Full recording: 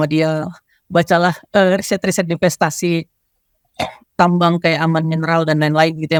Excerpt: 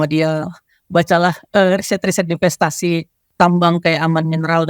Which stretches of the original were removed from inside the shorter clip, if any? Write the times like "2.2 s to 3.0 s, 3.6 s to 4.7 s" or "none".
3.2 s to 4.0 s